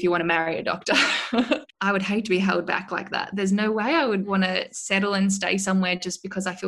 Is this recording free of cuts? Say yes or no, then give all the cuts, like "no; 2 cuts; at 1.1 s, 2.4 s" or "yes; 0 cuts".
no; 2 cuts; at 1.5 s, 4.3 s